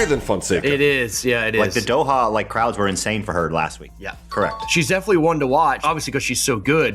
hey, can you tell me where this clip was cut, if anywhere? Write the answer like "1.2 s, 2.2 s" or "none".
3.9 s